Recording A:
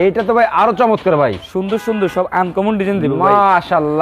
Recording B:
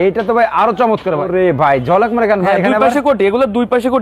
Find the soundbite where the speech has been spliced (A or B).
B